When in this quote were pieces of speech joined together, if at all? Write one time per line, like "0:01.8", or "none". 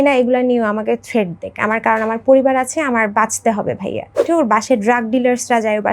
0:04.2